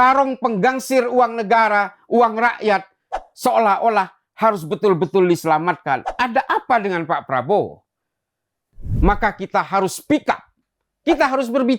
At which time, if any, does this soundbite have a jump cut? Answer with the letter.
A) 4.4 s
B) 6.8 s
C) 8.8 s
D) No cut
C